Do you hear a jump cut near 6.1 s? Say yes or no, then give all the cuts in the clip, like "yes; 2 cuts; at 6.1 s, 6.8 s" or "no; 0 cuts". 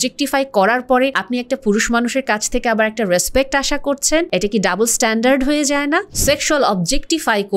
yes; 3 cuts; at 1.2 s, 4.3 s, 6.1 s